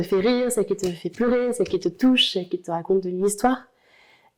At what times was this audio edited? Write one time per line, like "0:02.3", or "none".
none